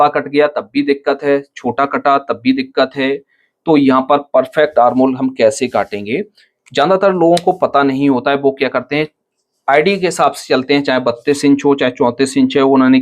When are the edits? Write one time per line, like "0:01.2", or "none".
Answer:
0:07.2